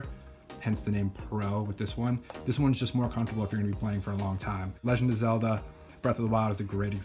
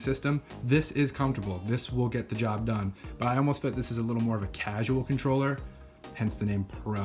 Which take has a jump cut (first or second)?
first